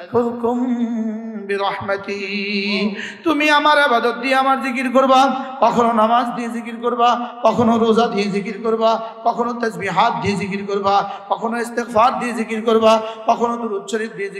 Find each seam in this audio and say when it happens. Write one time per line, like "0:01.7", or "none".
none

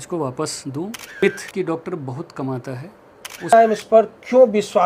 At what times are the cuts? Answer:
0:01.2
0:03.5

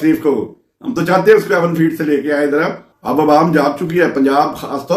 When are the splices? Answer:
0:02.9

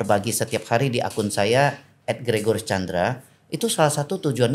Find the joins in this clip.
none

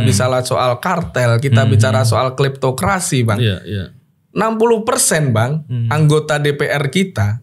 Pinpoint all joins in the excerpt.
none

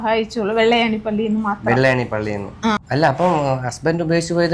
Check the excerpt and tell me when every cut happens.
0:02.8

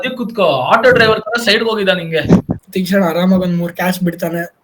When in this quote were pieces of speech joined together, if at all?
0:02.6

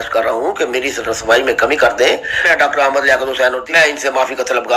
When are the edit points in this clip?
0:02.5
0:03.6

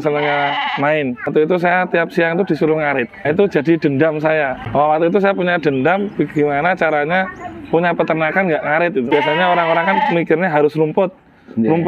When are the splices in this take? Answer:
0:01.3
0:03.3
0:04.6
0:09.1

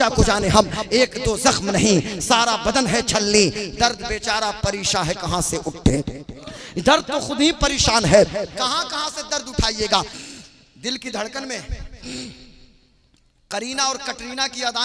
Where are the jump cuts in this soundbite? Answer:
0:10.2

